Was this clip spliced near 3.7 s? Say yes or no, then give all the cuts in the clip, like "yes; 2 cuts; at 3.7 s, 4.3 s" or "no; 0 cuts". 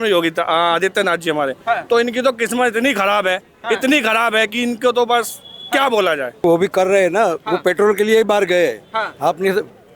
no; 1 cut; at 6.4 s